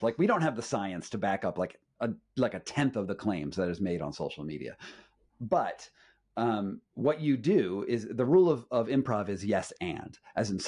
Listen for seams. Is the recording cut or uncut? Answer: uncut